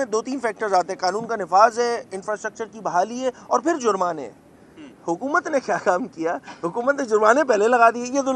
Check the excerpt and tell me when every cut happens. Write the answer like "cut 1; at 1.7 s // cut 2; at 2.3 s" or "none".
none

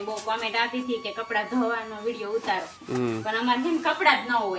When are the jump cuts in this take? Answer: none

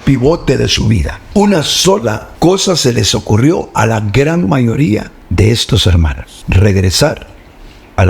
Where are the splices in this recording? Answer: cut 1; at 1.2 s // cut 2; at 2.3 s // cut 3; at 5.2 s // cut 4; at 6.3 s

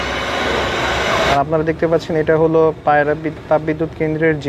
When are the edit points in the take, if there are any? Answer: cut 1; at 1.3 s

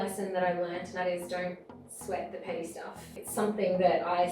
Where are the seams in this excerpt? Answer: cut 1; at 1.0 s // cut 2; at 3.2 s

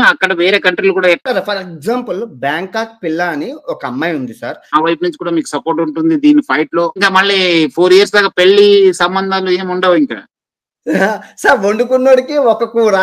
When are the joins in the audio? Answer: cut 1; at 1.2 s // cut 2; at 4.7 s // cut 3; at 7.0 s

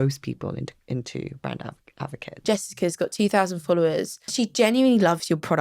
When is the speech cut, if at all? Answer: cut 1; at 2.4 s // cut 2; at 4.2 s

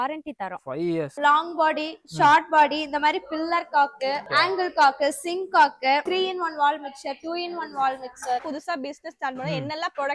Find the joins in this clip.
cut 1; at 1.1 s // cut 2; at 4.3 s // cut 3; at 6.1 s // cut 4; at 8.4 s

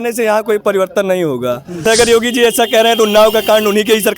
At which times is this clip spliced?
cut 1; at 1.8 s

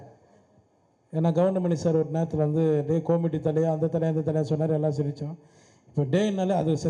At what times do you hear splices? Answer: none

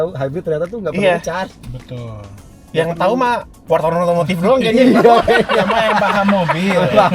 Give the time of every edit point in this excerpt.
none

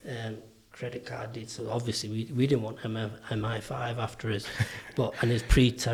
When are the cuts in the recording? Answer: none

